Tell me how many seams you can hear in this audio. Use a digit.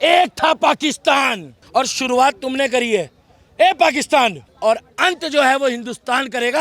2